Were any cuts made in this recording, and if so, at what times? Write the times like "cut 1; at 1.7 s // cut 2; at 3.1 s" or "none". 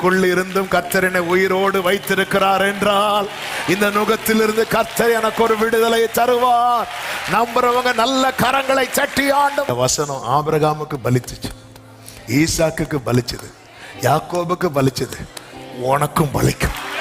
cut 1; at 9.7 s